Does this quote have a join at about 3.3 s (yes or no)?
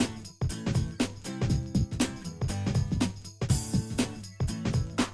yes